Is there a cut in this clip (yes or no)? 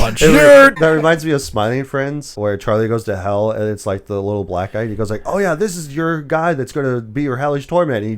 yes